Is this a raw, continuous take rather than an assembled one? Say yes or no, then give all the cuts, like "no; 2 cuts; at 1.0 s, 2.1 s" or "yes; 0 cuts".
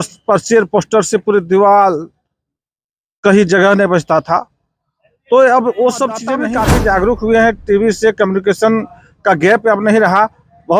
no; 1 cut; at 6.4 s